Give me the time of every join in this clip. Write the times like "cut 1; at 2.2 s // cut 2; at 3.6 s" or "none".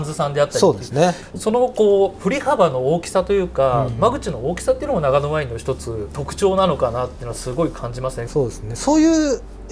cut 1; at 1.2 s // cut 2; at 6.2 s // cut 3; at 8.2 s